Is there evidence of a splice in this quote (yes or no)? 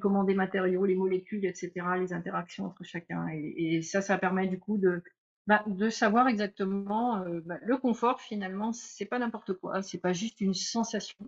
no